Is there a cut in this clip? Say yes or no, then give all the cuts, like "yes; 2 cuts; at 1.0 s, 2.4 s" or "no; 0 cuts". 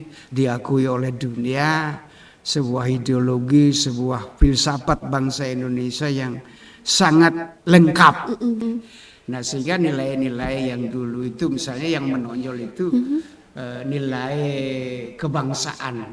yes; 1 cut; at 8.6 s